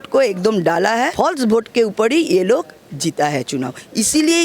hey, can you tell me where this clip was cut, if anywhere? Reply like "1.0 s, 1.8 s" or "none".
1.1 s